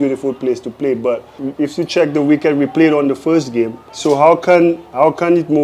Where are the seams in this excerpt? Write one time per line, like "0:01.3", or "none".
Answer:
0:01.3
0:03.8